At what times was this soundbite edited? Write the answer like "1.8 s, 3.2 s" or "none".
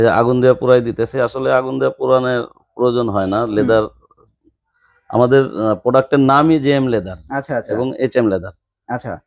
none